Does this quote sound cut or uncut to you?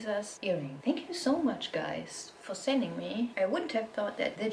uncut